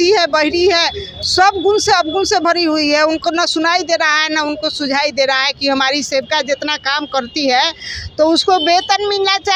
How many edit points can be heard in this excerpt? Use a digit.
0